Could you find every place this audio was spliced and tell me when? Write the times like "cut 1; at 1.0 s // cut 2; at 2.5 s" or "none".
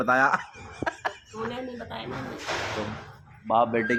none